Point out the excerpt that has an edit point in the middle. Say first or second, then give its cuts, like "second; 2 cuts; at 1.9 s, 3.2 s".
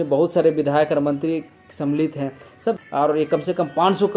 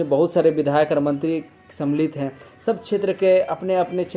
first; 1 cut; at 2.8 s